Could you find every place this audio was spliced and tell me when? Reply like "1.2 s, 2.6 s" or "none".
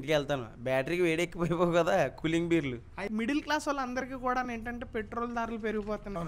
3.0 s